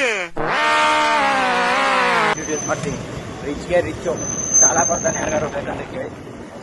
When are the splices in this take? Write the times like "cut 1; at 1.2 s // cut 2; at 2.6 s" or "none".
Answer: cut 1; at 2.3 s